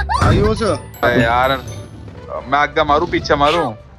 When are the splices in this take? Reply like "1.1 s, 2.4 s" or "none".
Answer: 1.0 s